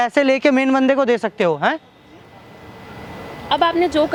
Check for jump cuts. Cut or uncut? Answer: uncut